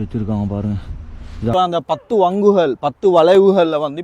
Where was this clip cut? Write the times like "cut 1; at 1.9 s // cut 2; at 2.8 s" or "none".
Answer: cut 1; at 1.5 s